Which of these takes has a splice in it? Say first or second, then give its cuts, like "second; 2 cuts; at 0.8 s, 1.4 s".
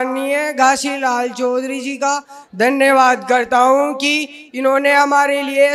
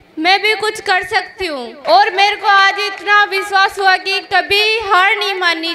second; 1 cut; at 1.7 s